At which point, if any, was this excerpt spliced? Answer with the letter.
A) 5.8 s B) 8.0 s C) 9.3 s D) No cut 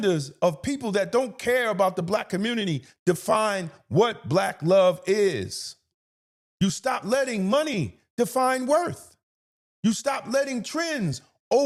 D